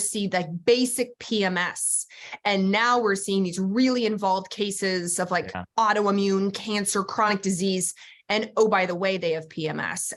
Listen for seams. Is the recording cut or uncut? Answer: uncut